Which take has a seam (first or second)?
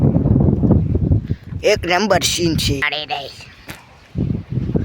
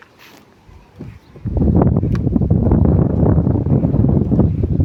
first